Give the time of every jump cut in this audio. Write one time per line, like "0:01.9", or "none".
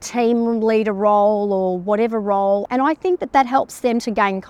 0:02.6